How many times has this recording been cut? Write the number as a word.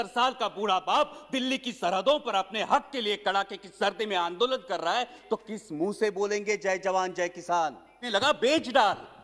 one